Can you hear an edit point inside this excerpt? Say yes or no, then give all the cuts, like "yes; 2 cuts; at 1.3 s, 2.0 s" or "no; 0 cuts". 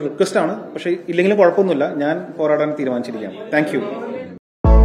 no; 0 cuts